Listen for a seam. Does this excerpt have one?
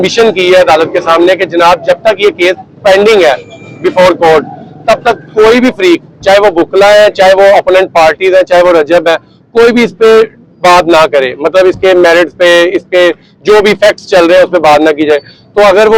no; 0 cuts

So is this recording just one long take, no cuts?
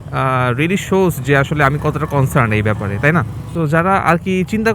no; 1 cut; at 3.4 s

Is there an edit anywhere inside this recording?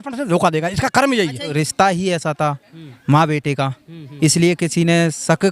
yes; 1 cut; at 1.5 s

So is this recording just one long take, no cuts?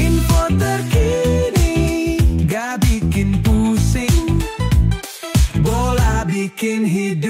yes; 0 cuts

